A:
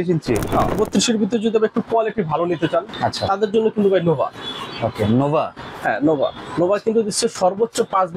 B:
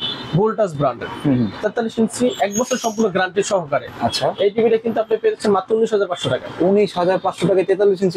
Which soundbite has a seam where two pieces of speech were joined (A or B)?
A